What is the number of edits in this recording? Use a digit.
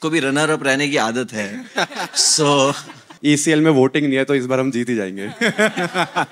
1